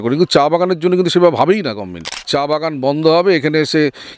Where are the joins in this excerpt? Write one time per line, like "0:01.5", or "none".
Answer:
0:02.2